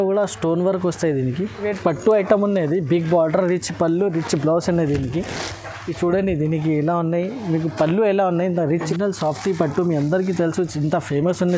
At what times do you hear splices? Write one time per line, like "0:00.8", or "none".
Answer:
0:01.6
0:08.9